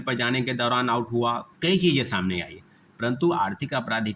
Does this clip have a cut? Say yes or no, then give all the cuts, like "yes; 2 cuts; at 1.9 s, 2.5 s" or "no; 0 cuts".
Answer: yes; 1 cut; at 1.5 s